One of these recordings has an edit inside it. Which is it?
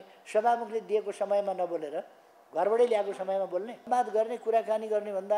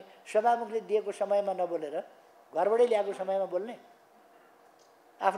first; 1 cut; at 3.9 s

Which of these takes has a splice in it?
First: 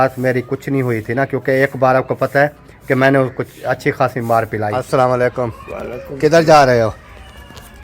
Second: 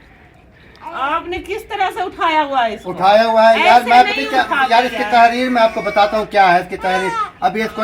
first; 1 cut; at 4.7 s

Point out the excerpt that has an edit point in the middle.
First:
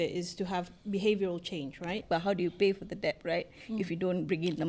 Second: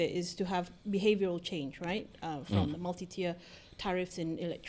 first; 1 cut; at 2.0 s

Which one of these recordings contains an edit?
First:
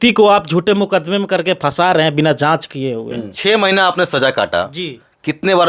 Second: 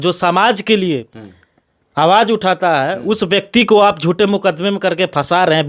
first; 1 cut; at 3.3 s

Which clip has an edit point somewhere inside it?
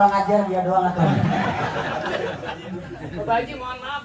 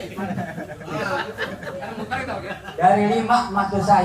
first; 1 cut; at 2.6 s

